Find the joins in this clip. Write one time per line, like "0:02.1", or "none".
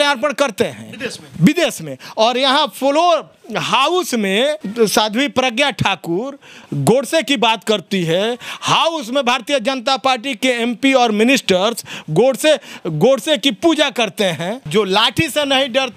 0:04.6
0:14.6